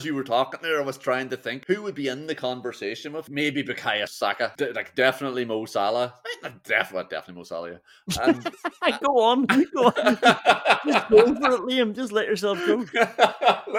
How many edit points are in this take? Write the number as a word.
three